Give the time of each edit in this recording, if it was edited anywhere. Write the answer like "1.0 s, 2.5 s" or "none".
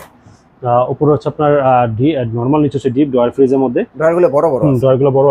none